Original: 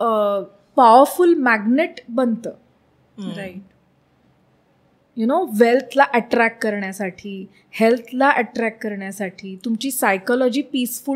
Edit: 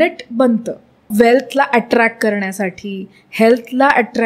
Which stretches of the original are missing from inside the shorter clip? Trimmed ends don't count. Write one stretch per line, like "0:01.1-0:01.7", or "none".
0:02.9-0:05.5